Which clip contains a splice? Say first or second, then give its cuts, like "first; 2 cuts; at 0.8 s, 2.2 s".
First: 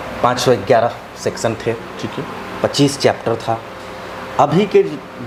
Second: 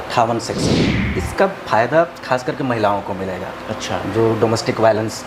second; 1 cut; at 0.9 s